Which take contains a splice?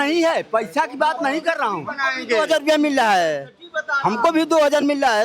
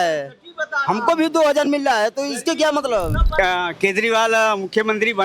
second; 1 cut; at 3.3 s

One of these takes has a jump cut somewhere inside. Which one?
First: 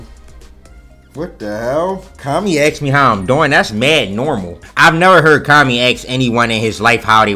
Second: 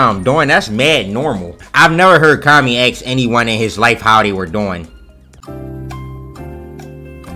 second; 1 cut; at 5.4 s

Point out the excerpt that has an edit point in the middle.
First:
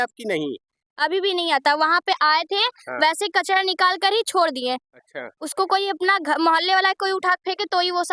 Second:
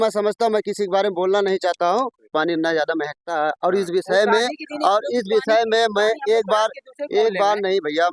second; 1 cut; at 2.3 s

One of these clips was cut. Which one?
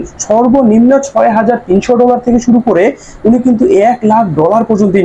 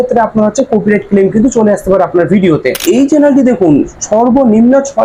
second; 1 cut; at 2.8 s

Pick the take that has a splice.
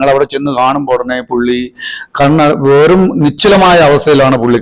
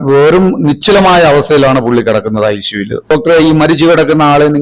second; 1 cut; at 3.0 s

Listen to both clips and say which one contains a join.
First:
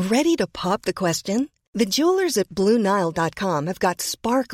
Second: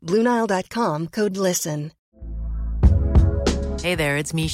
second; 1 cut; at 2.0 s

